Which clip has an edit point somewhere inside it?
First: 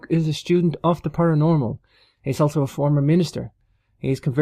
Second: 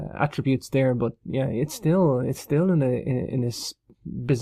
second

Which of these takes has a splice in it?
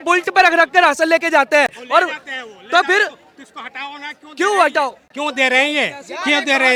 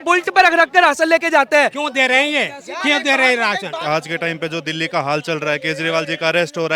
second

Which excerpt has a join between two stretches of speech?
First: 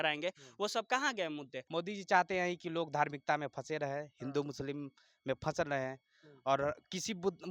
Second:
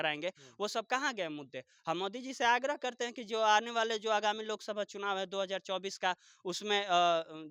first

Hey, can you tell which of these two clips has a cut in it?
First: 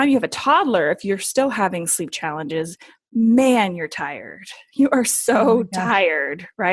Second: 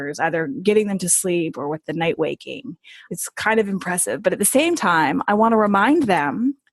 second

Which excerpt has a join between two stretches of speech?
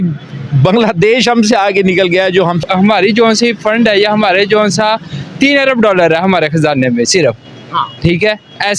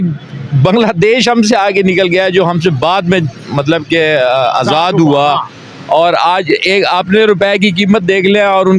first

